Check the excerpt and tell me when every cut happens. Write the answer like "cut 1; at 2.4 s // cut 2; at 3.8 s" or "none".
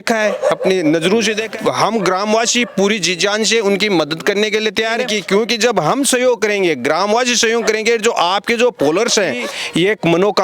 cut 1; at 1.5 s // cut 2; at 5.1 s // cut 3; at 9.5 s